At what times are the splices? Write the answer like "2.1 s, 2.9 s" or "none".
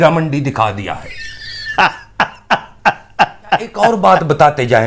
3.9 s

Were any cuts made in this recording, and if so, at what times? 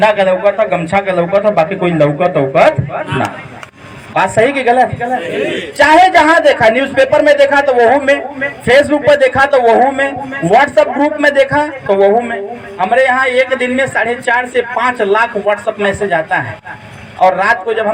none

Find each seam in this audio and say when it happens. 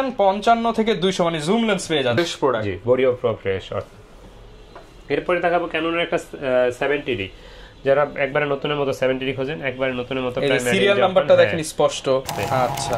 2.2 s, 12.2 s

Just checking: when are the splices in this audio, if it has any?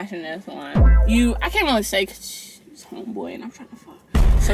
1.0 s

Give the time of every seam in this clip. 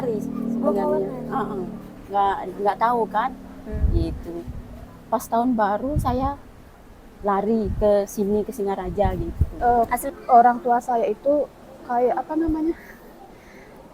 9.5 s

